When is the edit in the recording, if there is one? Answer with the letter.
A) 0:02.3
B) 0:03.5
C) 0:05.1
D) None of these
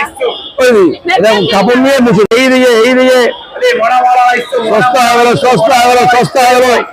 A